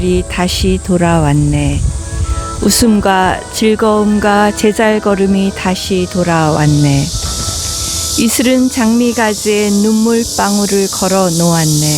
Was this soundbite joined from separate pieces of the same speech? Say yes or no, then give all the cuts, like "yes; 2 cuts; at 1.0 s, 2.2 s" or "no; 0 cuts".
no; 0 cuts